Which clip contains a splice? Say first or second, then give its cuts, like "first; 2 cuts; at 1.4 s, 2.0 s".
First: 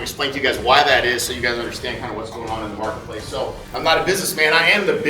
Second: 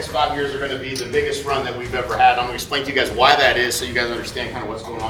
first; 1 cut; at 3.6 s